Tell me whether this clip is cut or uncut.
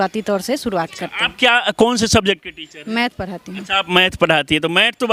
uncut